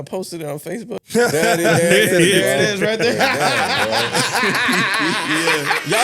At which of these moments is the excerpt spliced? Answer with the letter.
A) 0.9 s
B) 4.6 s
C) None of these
A